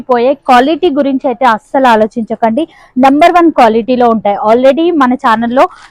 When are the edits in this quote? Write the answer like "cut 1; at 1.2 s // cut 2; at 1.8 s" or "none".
none

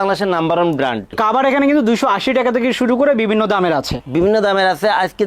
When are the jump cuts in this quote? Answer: cut 1; at 1.1 s // cut 2; at 4.0 s

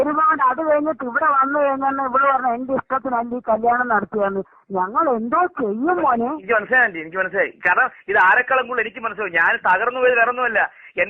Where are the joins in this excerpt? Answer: cut 1; at 7.9 s

